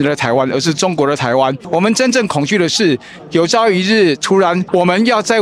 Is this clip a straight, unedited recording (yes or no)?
no